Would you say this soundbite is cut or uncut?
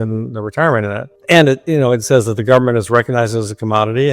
cut